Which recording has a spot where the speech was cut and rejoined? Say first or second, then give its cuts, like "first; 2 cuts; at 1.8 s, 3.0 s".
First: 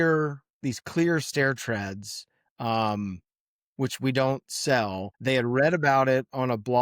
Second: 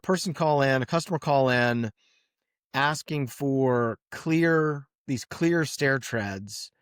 first; 1 cut; at 5.1 s